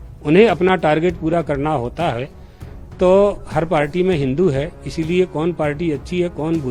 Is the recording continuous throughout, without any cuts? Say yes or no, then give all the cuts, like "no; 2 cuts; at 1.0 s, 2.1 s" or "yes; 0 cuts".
yes; 0 cuts